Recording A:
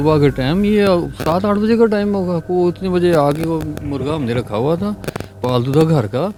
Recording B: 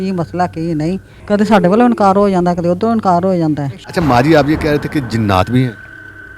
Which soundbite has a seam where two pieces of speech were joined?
B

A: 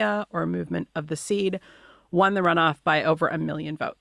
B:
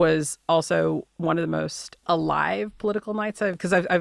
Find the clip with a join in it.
B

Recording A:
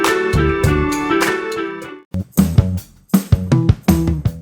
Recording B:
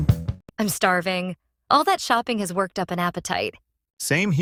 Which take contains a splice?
A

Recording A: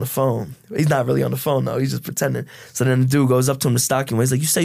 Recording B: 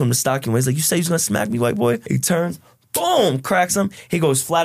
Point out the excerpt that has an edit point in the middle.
B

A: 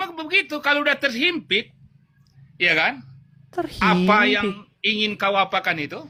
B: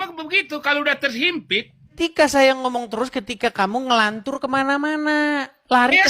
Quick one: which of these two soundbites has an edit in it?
B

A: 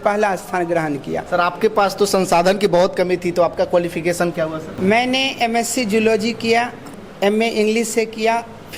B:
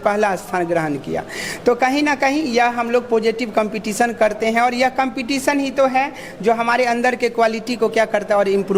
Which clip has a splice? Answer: A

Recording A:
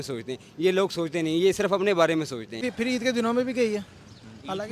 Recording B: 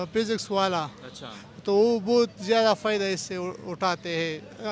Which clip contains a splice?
A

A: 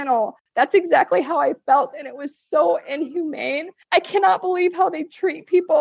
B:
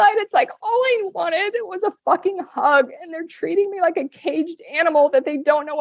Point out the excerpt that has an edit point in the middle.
A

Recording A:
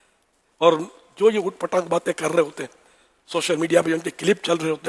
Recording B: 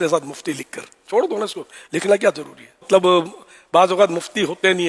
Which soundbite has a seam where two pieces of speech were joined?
B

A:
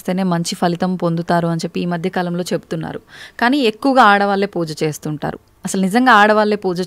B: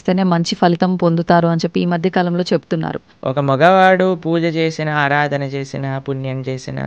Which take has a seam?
B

